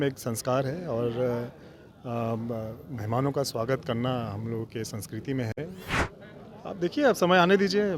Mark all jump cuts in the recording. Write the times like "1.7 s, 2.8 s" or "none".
6.0 s